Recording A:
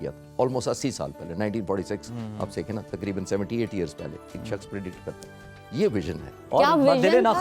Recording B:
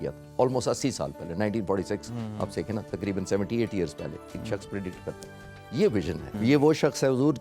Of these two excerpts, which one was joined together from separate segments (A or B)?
B